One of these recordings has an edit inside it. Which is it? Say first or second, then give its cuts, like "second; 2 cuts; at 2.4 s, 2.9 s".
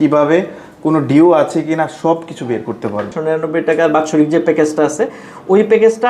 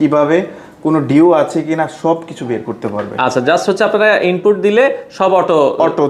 first; 1 cut; at 3.1 s